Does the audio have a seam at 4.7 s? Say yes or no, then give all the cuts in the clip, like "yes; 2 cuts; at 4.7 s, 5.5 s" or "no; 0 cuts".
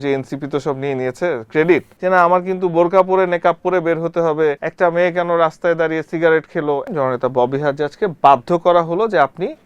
yes; 3 cuts; at 1.9 s, 4.7 s, 6.9 s